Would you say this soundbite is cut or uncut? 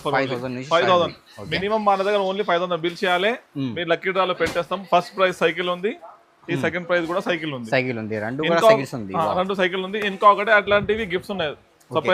uncut